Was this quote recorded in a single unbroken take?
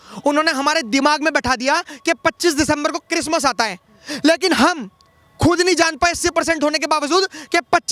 yes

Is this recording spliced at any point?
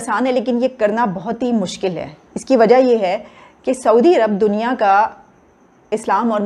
no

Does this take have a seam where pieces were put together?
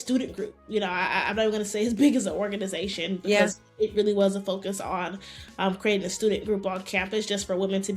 no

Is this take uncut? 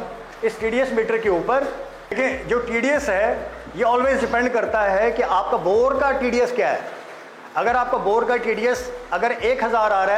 yes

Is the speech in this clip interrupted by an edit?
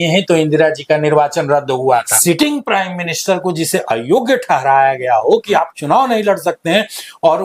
yes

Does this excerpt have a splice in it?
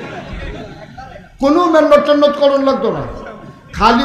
no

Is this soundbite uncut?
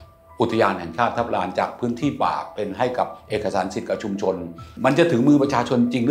no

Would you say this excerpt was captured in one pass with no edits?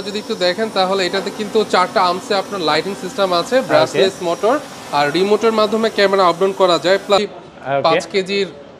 no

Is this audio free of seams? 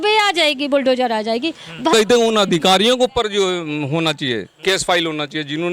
no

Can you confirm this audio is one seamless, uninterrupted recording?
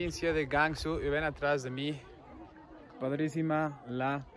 yes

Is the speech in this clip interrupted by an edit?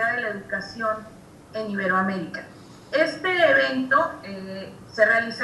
no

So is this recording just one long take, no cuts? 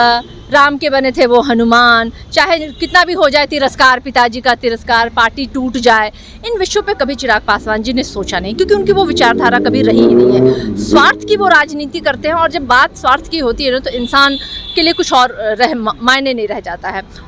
yes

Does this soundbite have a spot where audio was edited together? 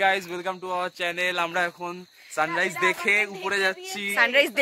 no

